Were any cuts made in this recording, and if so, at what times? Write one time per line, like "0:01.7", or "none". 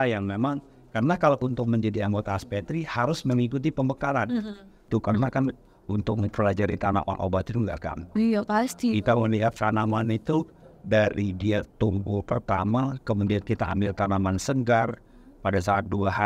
0:04.9